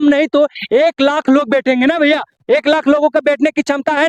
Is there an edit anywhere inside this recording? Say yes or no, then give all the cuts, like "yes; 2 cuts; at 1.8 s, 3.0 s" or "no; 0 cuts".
no; 0 cuts